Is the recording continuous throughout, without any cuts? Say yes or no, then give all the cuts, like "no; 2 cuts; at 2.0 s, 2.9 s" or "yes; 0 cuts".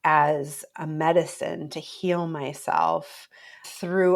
yes; 0 cuts